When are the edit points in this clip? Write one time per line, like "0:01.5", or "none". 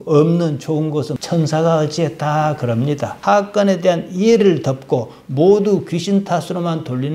0:01.2
0:03.1